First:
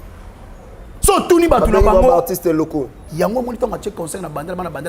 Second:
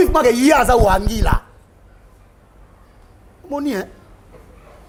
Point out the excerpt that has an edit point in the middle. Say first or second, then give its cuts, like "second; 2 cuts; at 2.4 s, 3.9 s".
first; 1 cut; at 3.0 s